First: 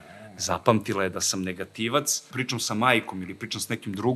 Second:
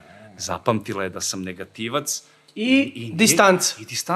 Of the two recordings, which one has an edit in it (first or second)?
first